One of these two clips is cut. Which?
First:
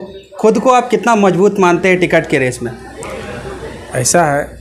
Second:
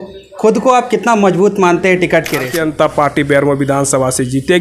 second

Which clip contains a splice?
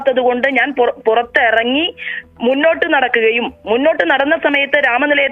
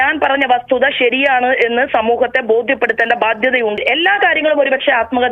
second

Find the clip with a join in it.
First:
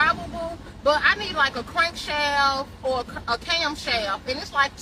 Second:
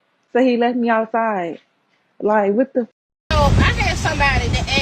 second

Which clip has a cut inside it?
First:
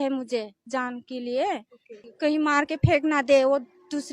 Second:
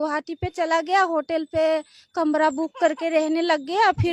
first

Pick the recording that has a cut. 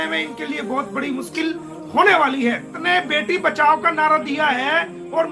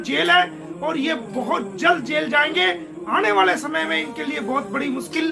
first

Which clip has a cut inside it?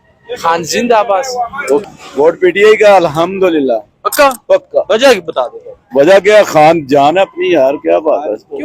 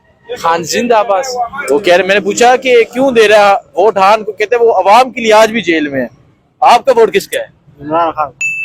first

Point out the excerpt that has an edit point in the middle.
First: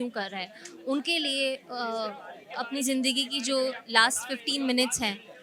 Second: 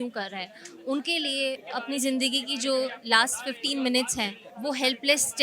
second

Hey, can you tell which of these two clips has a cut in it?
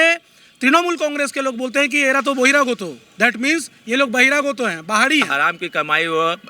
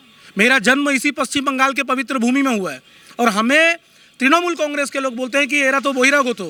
first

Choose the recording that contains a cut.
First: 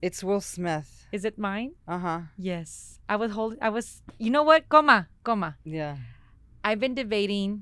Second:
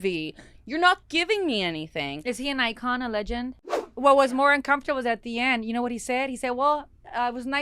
second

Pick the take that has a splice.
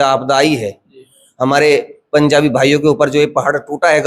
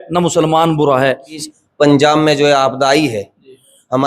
second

